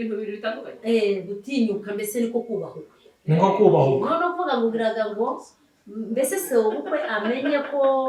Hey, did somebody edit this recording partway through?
no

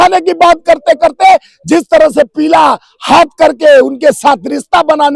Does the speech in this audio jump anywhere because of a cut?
no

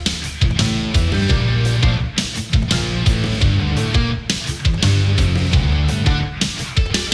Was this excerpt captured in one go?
yes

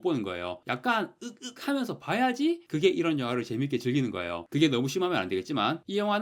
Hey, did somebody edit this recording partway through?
no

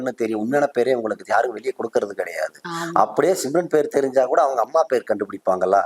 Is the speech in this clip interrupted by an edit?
no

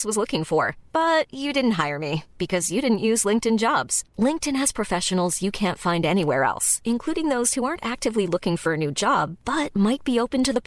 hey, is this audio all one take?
yes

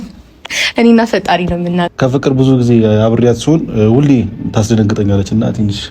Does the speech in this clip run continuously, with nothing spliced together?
no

